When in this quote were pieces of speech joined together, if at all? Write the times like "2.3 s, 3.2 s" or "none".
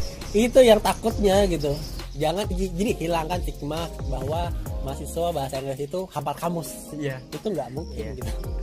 1.9 s